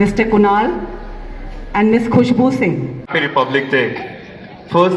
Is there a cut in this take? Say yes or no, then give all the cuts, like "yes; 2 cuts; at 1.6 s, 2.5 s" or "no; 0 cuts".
yes; 1 cut; at 3.2 s